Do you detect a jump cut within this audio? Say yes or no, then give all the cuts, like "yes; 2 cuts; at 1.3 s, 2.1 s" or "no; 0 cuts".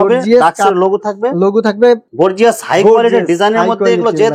yes; 1 cut; at 2.1 s